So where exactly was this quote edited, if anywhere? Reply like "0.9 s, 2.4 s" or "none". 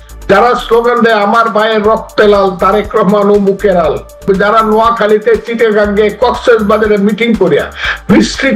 4.2 s